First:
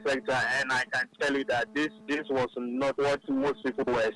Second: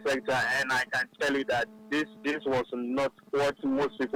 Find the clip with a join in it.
first; 2 cuts; at 1.7 s, 3.0 s

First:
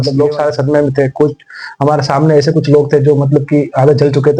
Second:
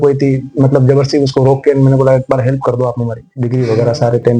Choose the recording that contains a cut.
second; 1 cut; at 3.2 s

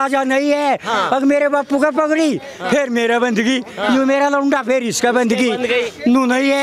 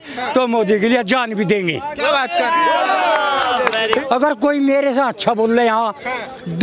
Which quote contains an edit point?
second; 1 cut; at 4.0 s

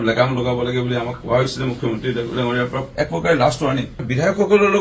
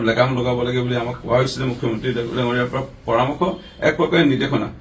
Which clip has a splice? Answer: first; 2 cuts; at 2.9 s, 3.9 s

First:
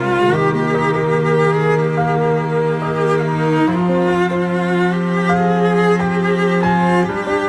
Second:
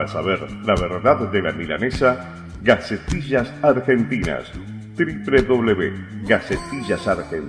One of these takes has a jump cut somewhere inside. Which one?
first; 1 cut; at 5.1 s

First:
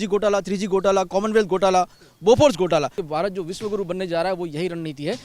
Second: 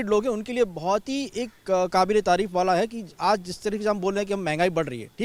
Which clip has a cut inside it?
first; 1 cut; at 3.0 s

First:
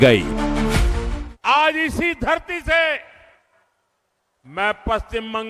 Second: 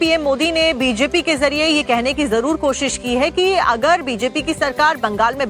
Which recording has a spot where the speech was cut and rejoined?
second; 1 cut; at 3.7 s

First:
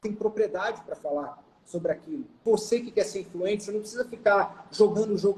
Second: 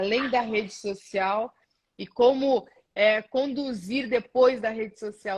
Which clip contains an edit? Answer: first; 1 cut; at 2.4 s

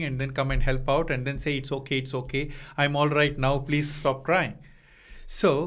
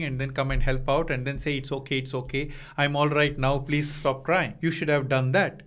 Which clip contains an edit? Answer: second; 1 cut; at 4.5 s

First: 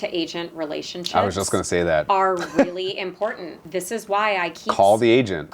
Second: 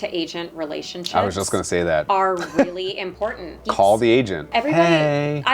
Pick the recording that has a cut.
second; 2 cuts; at 3.6 s, 4.4 s

